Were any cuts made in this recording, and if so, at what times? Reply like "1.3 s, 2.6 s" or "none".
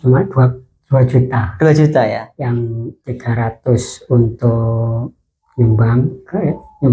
none

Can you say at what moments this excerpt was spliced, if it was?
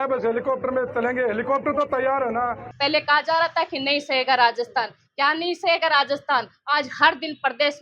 2.7 s

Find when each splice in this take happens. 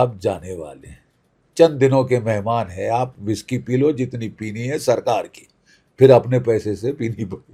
none

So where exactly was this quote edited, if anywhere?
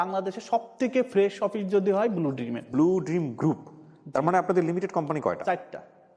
2.7 s

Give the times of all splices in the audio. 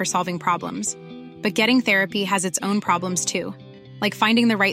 none

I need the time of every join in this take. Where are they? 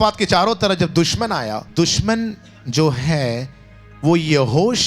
1.7 s

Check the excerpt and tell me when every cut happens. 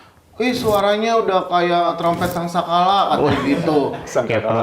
2.0 s

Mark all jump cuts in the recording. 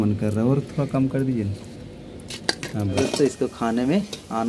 3.0 s

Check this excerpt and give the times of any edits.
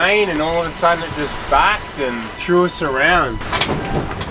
3.4 s

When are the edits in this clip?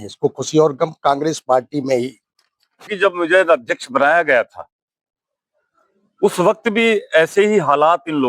2.9 s

